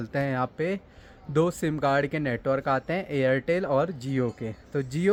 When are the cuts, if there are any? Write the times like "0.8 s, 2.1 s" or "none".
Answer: none